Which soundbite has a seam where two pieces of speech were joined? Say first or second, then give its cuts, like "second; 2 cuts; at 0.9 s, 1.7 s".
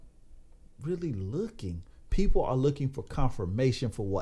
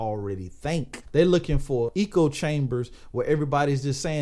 second; 2 cuts; at 1.0 s, 1.9 s